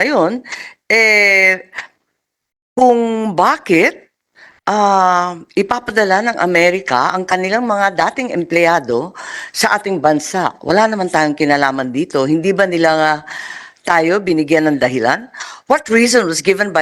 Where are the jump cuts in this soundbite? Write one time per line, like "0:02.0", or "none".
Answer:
none